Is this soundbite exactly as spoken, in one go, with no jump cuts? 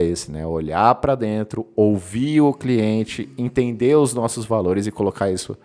yes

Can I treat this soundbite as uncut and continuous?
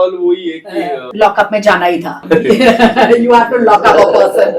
no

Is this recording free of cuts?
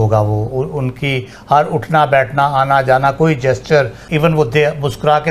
no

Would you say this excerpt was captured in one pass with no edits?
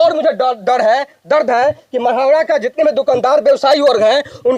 yes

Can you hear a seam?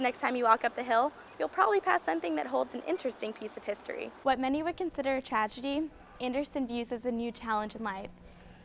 yes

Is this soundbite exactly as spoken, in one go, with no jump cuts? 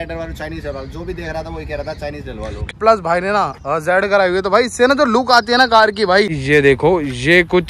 no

